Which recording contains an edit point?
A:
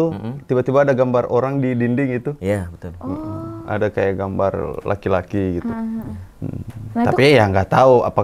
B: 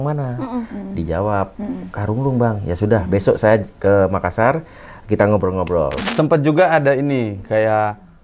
B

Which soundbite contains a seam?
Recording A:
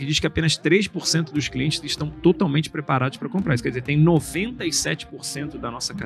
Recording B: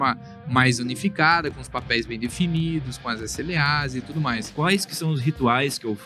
B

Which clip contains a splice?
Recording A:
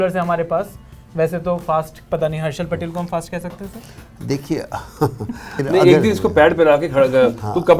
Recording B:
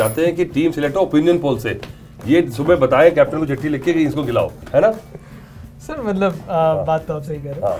A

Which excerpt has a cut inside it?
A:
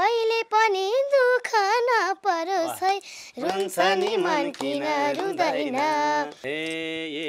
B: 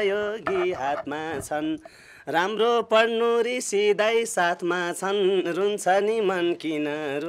A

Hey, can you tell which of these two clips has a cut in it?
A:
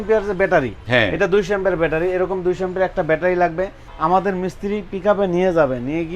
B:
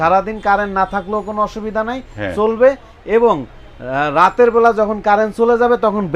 A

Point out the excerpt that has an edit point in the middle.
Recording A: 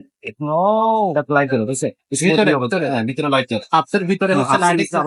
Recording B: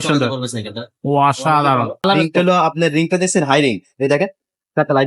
B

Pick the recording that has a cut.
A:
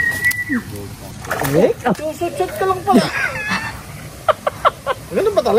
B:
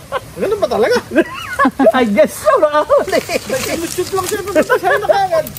A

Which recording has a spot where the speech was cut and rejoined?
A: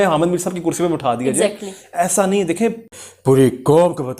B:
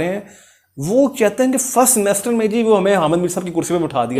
A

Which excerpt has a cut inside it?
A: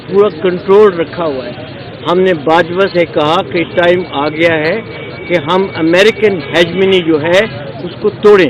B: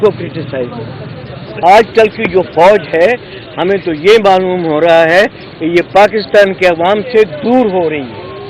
B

